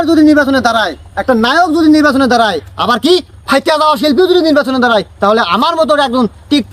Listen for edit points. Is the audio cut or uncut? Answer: uncut